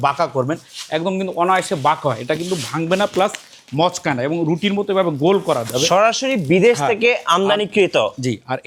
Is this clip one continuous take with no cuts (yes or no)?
yes